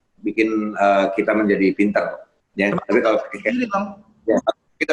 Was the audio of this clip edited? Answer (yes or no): no